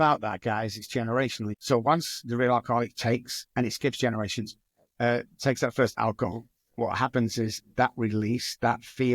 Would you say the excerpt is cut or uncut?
cut